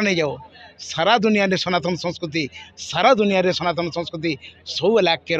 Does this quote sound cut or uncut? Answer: uncut